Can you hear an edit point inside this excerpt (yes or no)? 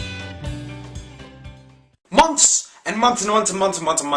no